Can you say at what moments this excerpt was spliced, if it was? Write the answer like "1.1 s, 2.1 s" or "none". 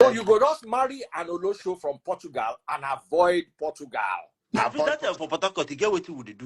4.9 s